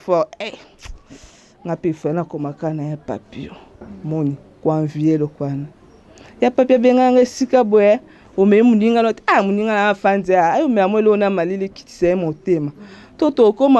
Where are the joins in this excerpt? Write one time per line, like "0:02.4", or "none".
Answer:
none